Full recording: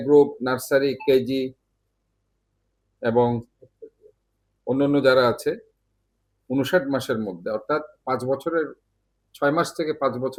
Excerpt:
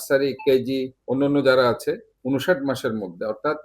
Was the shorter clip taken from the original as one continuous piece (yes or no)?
no